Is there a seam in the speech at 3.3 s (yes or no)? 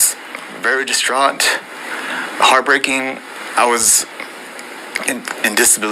no